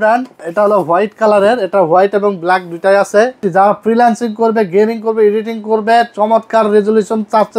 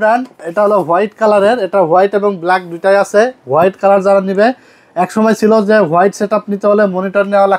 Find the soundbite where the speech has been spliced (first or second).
first